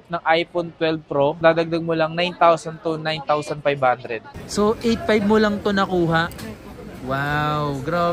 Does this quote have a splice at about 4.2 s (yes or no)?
yes